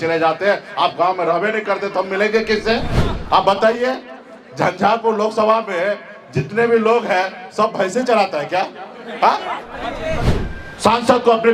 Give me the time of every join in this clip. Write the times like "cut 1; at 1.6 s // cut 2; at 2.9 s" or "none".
cut 1; at 10.3 s